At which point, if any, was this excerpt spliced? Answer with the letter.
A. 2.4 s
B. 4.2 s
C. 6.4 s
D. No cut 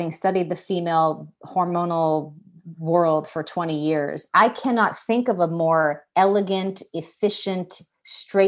B